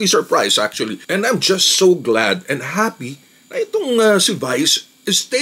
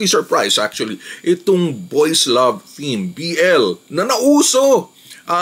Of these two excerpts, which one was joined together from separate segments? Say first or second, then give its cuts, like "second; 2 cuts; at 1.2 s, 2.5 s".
first; 1 cut; at 1.0 s